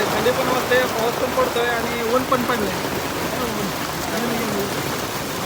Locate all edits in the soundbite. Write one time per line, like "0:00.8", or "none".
none